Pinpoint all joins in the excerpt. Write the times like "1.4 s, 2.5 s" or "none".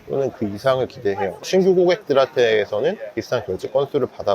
1.4 s

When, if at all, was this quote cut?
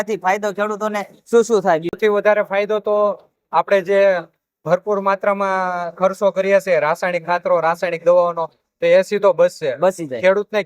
1.9 s

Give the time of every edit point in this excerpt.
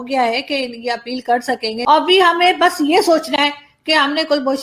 1.7 s

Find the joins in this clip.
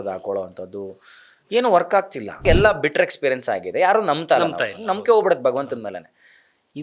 2.4 s

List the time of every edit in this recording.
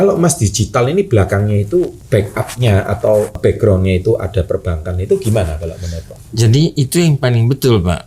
2.0 s, 3.4 s

